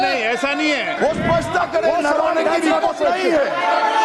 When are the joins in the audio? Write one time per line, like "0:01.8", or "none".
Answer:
0:01.0